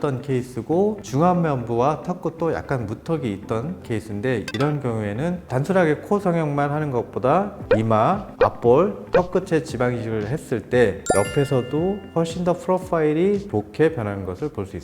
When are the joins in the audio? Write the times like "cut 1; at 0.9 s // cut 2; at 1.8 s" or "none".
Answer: cut 1; at 1.0 s // cut 2; at 3.9 s // cut 3; at 11.0 s // cut 4; at 13.5 s